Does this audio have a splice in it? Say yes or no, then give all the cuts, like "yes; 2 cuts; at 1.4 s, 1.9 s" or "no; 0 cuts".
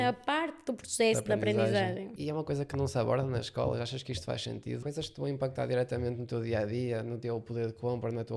yes; 3 cuts; at 2.1 s, 4.8 s, 7.2 s